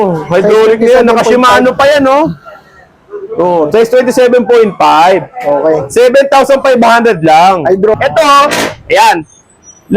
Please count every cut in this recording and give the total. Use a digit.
1